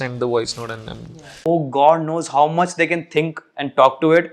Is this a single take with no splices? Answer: no; 1 cut; at 1.5 s

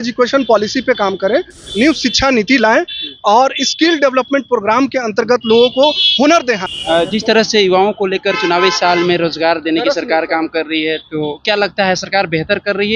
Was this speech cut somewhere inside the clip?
yes; 1 cut; at 6.7 s

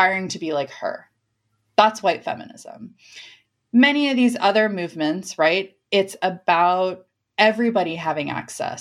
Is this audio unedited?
yes; 0 cuts

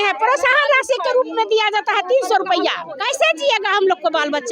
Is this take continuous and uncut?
no; 1 cut; at 2.9 s

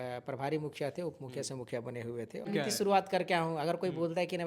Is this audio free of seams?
no; 1 cut; at 2.5 s

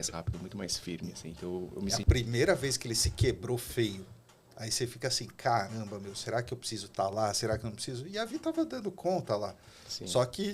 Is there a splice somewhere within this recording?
yes; 1 cut; at 1.9 s

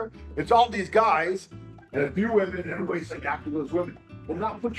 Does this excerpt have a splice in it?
yes; 1 cut; at 1.8 s

